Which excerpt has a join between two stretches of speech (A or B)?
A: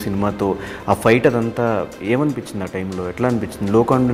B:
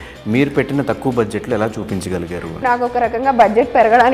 B